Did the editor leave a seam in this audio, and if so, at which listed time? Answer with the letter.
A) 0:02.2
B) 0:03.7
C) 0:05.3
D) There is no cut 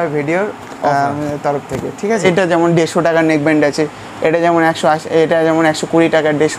A